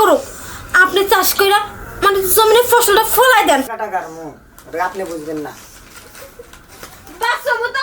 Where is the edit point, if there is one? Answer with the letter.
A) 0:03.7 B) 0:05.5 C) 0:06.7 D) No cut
A